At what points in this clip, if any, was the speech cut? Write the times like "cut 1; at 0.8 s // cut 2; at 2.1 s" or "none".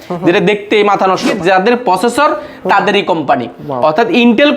cut 1; at 1.3 s

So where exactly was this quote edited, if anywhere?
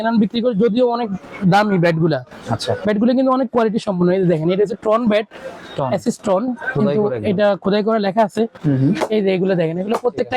cut 1; at 8.6 s

